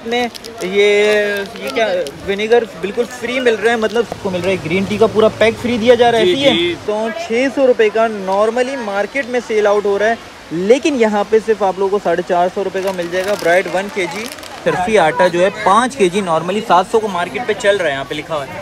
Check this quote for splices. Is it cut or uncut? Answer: cut